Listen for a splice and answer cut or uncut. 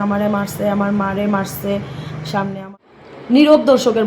cut